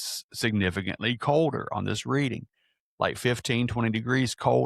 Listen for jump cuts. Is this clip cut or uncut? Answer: uncut